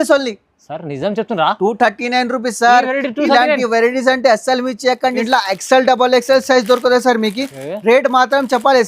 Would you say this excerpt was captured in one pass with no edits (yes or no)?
no